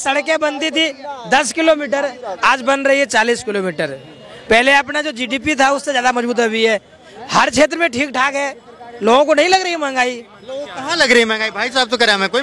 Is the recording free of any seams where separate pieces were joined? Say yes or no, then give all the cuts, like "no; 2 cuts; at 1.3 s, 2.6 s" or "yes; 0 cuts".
yes; 0 cuts